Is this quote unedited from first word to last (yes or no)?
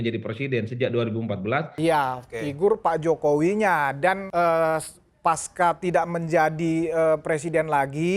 no